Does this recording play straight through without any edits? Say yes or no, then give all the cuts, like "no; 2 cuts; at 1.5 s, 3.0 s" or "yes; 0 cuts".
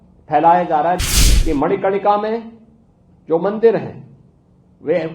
no; 1 cut; at 1.1 s